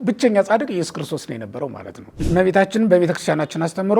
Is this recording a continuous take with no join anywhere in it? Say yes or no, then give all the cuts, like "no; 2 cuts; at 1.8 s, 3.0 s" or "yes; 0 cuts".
no; 1 cut; at 2.1 s